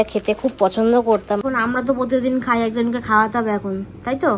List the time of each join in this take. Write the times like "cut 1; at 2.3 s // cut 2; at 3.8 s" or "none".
cut 1; at 1.4 s